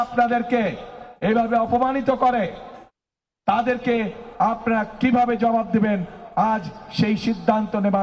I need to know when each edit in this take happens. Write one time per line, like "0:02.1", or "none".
none